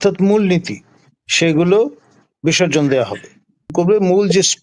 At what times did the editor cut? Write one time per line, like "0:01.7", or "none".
0:03.7